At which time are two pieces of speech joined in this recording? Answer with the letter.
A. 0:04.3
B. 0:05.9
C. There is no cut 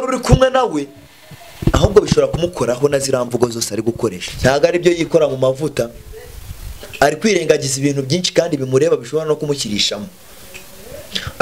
A